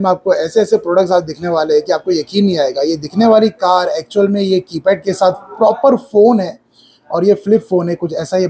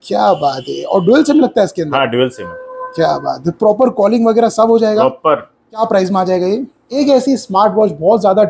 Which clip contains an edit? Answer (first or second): second